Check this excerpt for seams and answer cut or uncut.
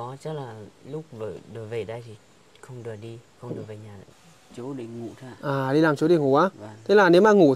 cut